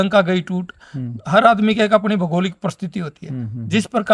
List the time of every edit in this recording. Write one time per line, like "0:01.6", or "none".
none